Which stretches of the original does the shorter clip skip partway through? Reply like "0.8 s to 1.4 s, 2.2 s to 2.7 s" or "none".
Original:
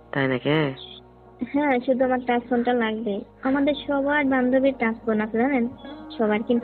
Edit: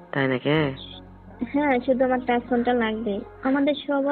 none